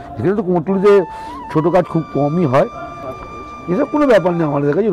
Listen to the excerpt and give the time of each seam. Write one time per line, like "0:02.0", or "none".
0:03.0